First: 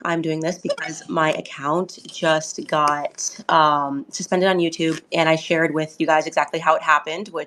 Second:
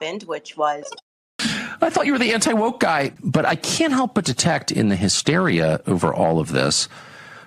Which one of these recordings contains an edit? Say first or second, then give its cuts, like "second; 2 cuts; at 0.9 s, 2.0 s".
second; 2 cuts; at 1.3 s, 3.1 s